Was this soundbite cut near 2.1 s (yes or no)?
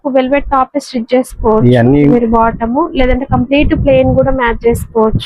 yes